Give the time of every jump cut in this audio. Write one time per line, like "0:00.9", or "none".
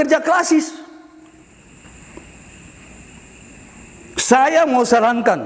0:01.4